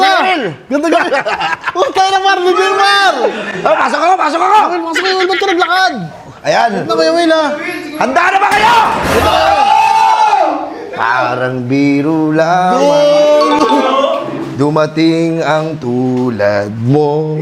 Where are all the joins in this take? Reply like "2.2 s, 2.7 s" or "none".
none